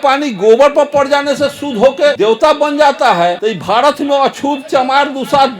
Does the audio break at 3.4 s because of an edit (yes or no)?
yes